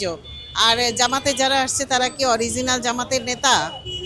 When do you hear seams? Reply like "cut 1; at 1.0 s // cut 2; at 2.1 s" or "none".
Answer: none